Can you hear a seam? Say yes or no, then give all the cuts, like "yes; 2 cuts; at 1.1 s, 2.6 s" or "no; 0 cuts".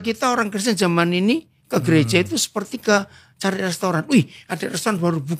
no; 0 cuts